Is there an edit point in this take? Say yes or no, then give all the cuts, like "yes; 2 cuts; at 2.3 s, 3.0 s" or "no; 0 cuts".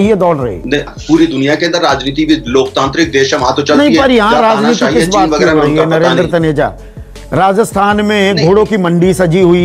no; 0 cuts